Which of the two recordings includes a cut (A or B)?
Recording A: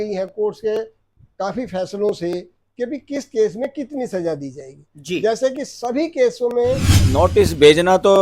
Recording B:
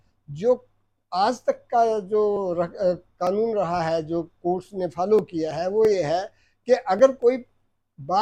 A